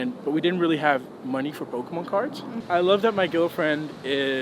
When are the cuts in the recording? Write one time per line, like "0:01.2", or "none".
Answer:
0:02.6

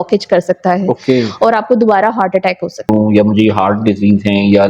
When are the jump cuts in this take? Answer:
0:02.8

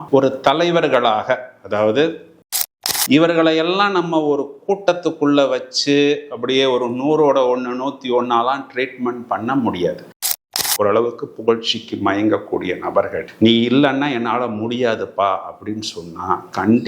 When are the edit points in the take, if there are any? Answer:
0:02.4
0:10.3

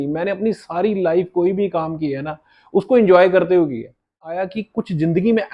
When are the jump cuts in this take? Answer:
0:04.3

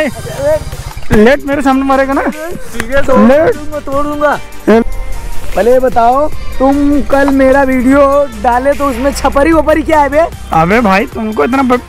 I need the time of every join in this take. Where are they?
0:04.8

